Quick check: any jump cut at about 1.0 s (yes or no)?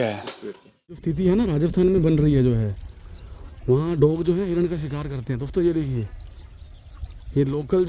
yes